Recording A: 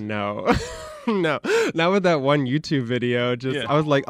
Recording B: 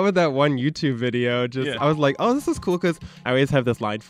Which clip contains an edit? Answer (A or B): B